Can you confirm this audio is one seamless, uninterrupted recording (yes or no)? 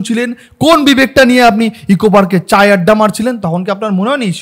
yes